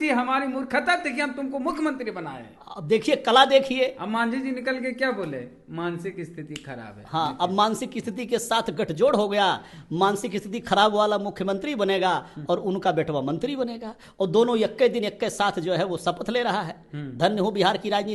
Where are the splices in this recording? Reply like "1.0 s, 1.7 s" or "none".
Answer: none

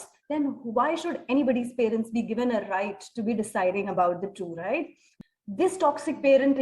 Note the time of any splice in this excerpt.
5.1 s

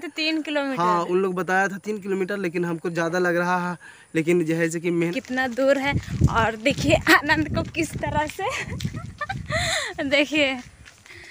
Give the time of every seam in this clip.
5.1 s

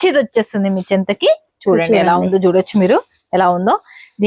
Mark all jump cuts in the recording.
none

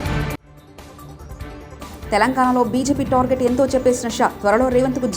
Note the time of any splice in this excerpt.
1.8 s

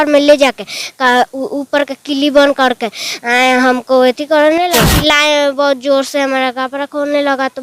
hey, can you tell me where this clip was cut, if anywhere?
4.7 s

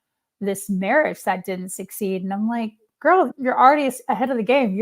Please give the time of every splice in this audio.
3.3 s

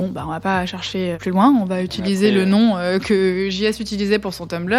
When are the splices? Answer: 1.2 s

